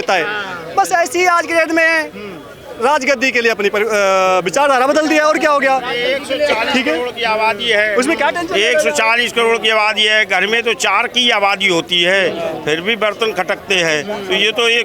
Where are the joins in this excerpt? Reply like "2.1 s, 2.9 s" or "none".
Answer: none